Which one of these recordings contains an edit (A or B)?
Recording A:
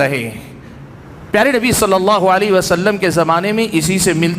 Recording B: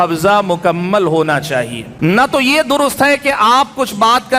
B